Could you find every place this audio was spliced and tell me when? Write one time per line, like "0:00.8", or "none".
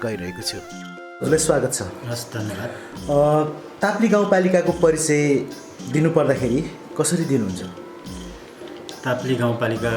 none